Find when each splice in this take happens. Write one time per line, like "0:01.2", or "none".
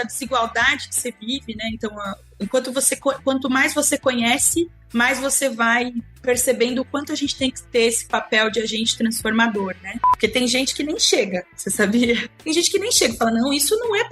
0:10.0
0:12.3